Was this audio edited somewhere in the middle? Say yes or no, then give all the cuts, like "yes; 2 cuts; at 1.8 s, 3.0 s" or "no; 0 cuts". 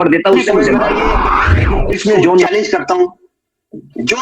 yes; 1 cut; at 2.4 s